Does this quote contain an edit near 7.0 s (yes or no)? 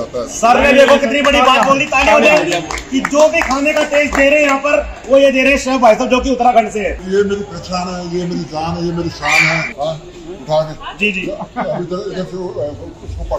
yes